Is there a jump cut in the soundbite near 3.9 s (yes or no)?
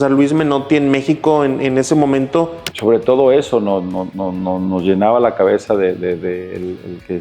no